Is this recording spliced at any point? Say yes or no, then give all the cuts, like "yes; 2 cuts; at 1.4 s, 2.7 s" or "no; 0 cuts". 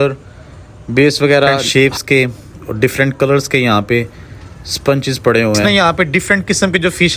yes; 2 cuts; at 1.6 s, 5.6 s